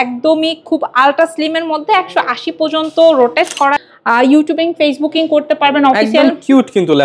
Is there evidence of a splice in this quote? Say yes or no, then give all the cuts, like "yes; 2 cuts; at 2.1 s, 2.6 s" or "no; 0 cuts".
yes; 1 cut; at 3.8 s